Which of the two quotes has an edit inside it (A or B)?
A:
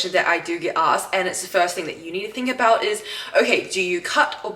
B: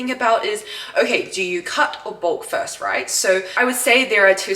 B